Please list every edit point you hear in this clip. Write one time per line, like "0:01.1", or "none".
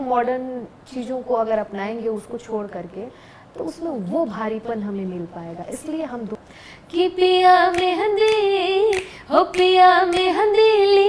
0:06.4